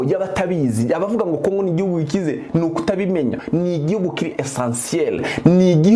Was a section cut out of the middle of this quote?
yes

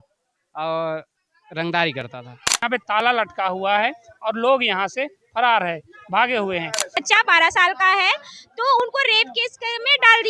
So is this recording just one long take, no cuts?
no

